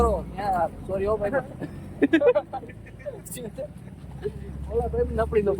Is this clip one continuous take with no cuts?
no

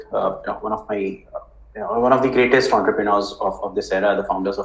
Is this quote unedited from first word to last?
yes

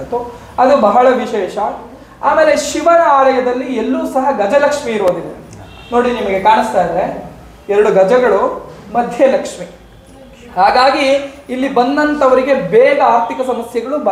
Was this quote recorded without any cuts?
yes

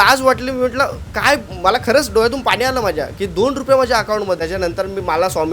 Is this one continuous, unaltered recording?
no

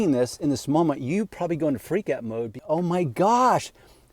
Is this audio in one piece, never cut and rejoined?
no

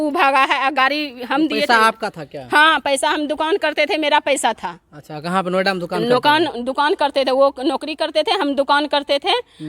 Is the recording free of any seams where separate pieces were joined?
yes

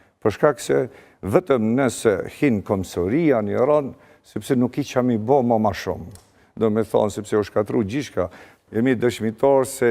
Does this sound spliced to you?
yes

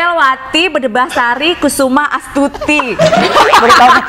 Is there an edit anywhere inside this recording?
no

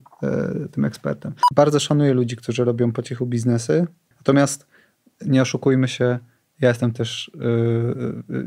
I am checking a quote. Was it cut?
yes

